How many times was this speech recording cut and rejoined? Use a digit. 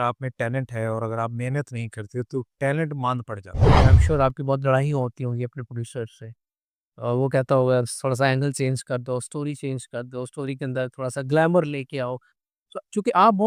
1